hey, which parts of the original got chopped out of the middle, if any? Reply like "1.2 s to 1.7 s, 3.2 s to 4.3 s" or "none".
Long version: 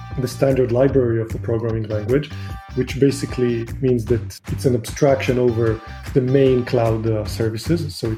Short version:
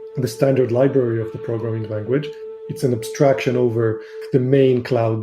2.6 s to 4.4 s